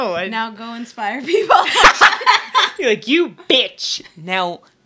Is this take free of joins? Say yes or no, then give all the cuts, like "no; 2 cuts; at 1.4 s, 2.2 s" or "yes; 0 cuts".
yes; 0 cuts